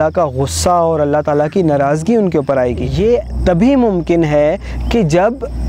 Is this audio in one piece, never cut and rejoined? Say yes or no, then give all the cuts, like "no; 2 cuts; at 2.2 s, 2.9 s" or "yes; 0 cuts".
no; 1 cut; at 2.9 s